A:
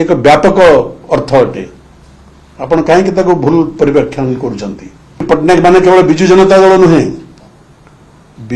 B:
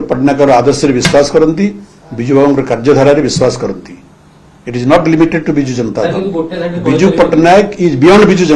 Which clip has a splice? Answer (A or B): A